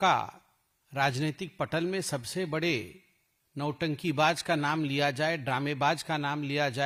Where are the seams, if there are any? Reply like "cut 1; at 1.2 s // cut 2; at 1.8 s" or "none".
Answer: none